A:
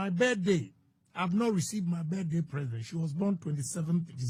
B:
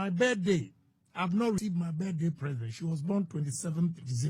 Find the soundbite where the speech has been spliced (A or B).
B